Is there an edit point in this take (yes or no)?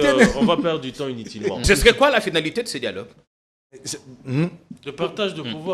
yes